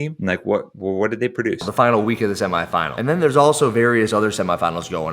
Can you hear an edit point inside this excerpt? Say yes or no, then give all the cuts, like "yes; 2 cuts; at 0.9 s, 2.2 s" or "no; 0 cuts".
no; 0 cuts